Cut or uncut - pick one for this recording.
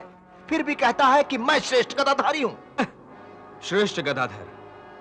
uncut